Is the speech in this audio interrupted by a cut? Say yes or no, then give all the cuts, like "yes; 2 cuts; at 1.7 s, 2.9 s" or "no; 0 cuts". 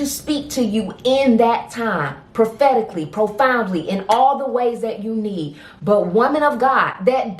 no; 0 cuts